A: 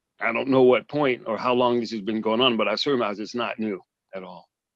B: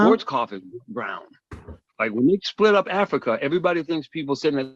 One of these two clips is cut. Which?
B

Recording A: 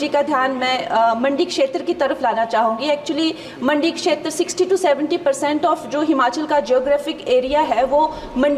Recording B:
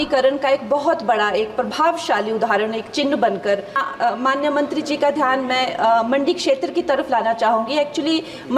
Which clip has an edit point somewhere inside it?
B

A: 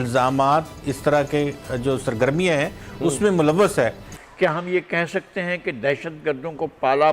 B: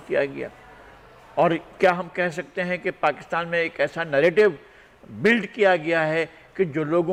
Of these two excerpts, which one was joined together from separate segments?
A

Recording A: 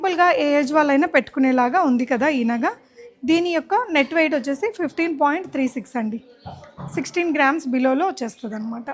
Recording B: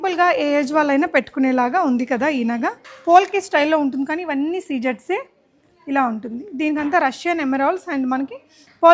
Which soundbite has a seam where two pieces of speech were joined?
B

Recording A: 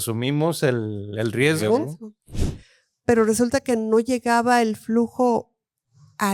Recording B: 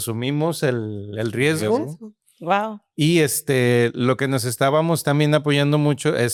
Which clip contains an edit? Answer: A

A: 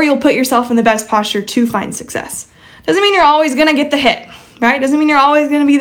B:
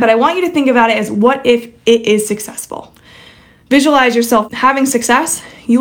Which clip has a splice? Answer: B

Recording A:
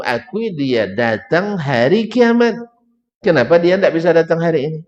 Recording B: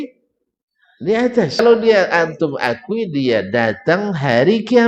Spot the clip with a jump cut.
B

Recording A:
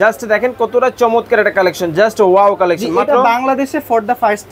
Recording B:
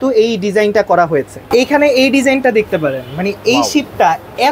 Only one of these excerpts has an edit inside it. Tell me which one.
B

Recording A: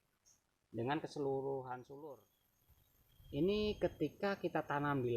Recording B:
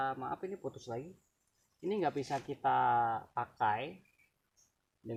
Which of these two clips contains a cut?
A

